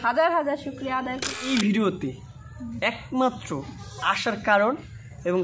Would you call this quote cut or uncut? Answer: cut